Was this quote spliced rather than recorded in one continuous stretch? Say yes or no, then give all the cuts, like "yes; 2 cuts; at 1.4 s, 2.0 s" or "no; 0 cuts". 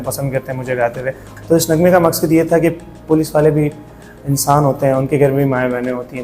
yes; 1 cut; at 1.3 s